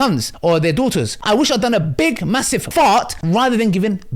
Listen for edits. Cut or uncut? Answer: cut